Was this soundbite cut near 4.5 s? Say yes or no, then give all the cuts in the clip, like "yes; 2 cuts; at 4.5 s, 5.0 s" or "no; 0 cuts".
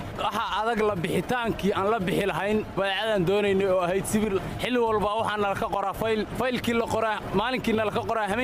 yes; 2 cuts; at 4.5 s, 6.3 s